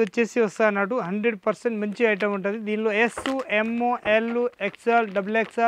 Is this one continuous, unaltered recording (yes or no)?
yes